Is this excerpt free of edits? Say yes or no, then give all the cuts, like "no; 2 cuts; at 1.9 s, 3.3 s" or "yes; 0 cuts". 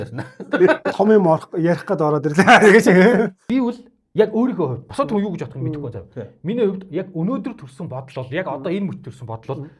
no; 1 cut; at 3.4 s